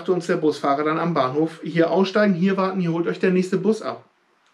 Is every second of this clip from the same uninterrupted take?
yes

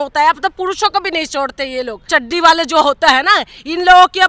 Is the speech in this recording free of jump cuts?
no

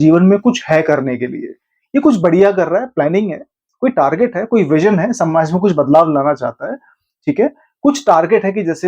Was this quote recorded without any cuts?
yes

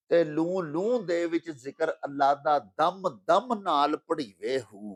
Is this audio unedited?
yes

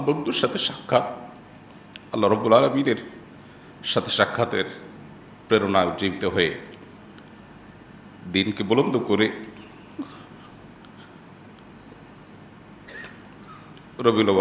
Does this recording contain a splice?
no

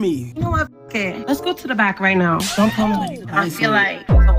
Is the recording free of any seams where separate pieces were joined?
no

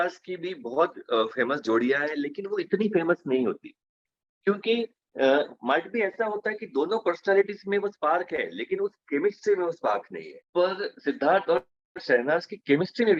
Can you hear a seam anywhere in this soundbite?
no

